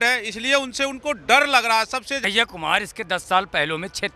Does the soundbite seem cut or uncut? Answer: cut